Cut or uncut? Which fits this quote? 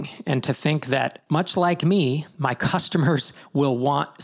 cut